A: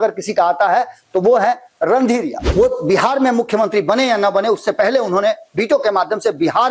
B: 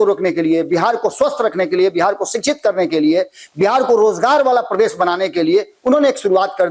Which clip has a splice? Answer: A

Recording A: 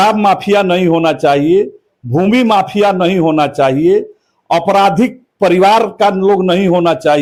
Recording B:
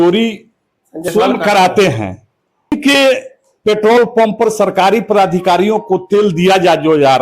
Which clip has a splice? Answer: B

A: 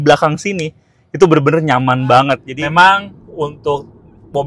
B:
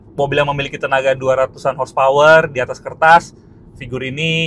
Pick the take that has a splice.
A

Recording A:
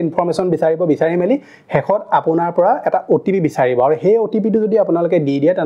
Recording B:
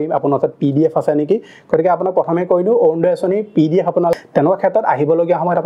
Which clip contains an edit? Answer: B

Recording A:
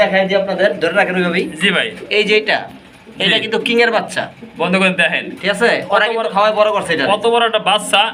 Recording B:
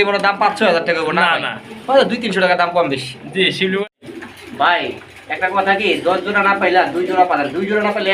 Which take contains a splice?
B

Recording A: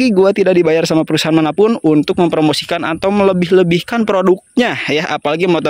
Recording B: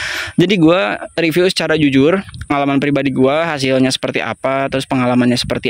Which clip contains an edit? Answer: B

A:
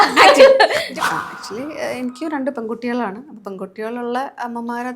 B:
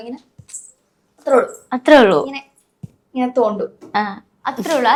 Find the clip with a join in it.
A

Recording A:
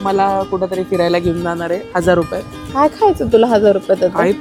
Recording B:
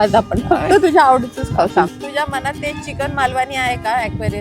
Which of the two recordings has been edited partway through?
B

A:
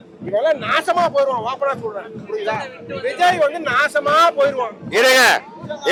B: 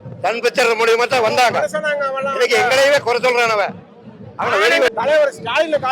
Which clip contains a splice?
B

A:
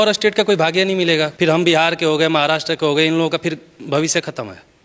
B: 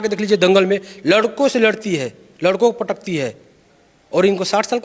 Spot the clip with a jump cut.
A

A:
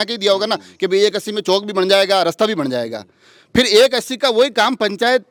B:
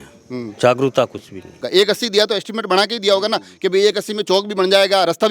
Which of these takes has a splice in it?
B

